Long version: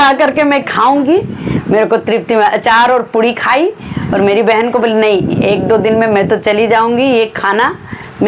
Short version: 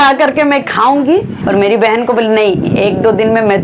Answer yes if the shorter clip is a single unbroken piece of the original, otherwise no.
no